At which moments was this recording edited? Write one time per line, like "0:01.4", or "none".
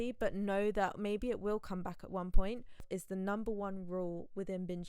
0:02.8